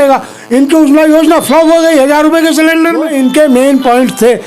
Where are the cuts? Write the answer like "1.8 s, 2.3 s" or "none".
3.1 s